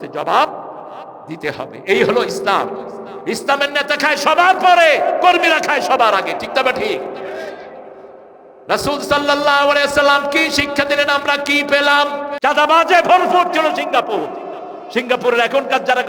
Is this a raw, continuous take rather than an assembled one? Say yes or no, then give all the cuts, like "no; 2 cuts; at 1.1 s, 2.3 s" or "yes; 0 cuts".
no; 1 cut; at 12.3 s